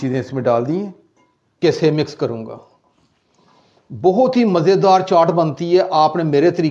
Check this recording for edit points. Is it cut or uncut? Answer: cut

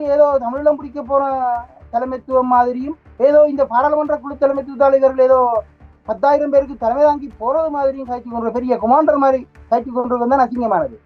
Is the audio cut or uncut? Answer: uncut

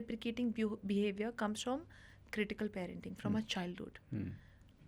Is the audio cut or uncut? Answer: uncut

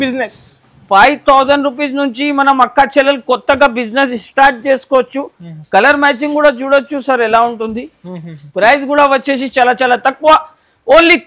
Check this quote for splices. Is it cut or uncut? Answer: uncut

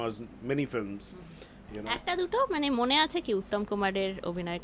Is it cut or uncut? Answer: uncut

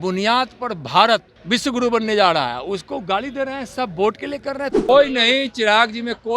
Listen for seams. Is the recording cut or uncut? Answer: cut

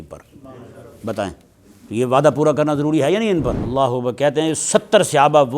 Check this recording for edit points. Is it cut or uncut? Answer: cut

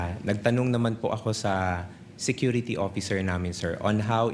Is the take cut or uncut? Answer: uncut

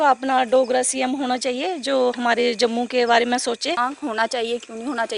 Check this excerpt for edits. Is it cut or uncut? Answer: cut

